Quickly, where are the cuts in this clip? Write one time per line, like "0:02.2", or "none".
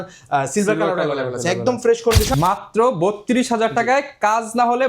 0:02.4